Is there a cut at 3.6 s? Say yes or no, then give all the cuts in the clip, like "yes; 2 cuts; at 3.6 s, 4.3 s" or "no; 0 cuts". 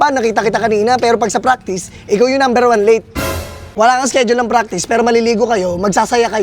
yes; 1 cut; at 3.6 s